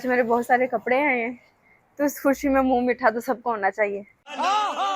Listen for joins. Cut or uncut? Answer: uncut